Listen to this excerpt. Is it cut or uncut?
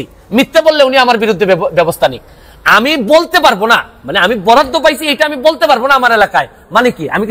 uncut